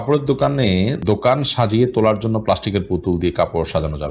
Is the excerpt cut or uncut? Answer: cut